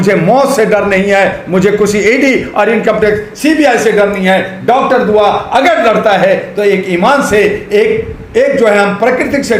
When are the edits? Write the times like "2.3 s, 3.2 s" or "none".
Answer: none

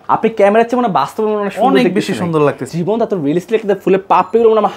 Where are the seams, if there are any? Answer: 2.7 s

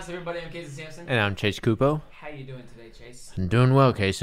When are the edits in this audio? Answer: 1.2 s

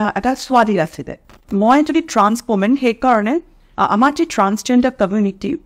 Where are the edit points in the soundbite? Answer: 1.4 s

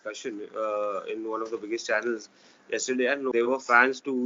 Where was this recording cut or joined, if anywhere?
3.3 s

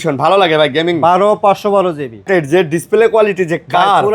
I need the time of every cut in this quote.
2.3 s

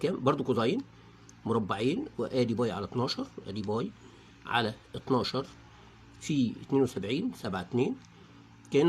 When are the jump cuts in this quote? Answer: 4.9 s

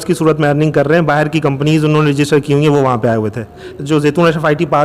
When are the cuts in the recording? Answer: 3.7 s

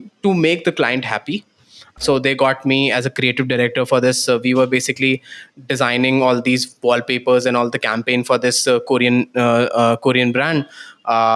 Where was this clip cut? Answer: 2.0 s

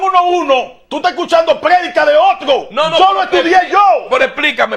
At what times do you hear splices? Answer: none

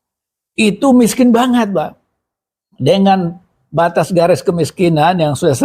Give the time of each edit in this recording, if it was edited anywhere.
none

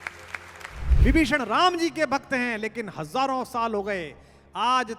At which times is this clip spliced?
0.9 s

